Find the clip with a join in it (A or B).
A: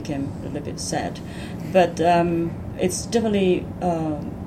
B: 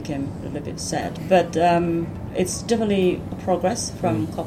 B